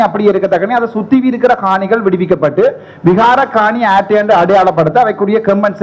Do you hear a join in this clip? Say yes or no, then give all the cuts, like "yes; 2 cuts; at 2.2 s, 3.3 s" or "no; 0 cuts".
no; 0 cuts